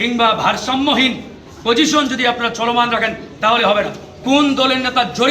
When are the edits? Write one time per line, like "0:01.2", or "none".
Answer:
0:04.1